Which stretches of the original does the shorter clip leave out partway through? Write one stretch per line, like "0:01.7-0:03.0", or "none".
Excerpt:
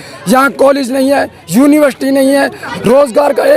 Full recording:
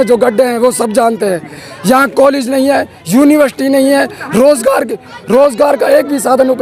0:04.2-0:05.1